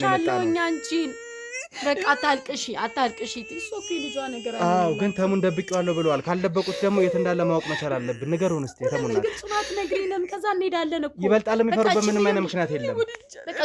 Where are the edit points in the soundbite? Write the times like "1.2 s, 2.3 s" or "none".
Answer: none